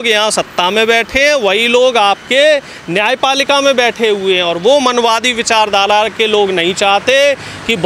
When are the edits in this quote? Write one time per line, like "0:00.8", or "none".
none